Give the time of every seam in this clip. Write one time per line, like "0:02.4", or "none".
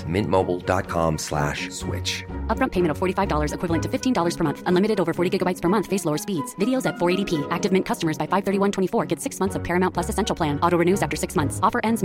none